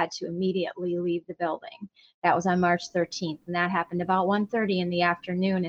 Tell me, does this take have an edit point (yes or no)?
no